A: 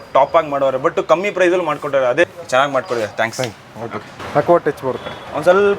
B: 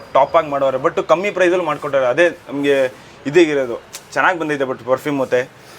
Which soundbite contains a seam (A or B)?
A